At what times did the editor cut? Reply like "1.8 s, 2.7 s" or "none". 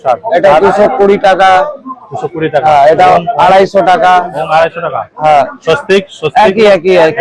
none